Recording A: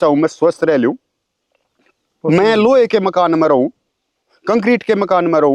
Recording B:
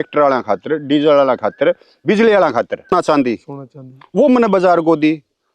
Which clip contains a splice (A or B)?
B